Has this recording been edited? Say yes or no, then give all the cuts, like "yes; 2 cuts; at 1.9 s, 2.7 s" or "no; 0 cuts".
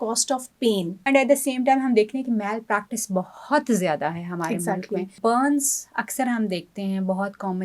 yes; 2 cuts; at 0.9 s, 5.1 s